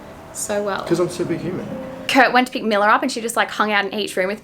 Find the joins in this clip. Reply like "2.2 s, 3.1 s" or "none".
2.0 s